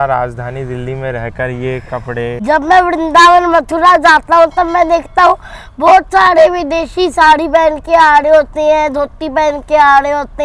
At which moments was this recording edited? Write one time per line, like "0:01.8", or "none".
0:02.4